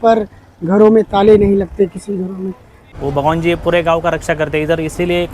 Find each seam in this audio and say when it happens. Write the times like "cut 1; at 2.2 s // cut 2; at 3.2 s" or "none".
cut 1; at 2.9 s